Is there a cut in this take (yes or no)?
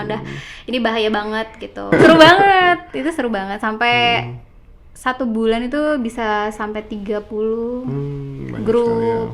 yes